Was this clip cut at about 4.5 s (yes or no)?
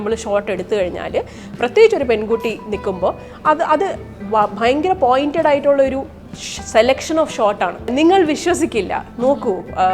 no